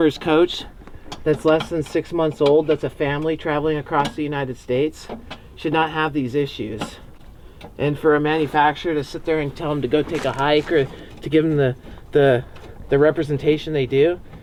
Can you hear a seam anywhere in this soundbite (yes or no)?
no